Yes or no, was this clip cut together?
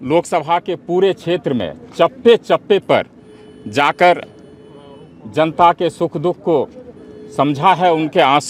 no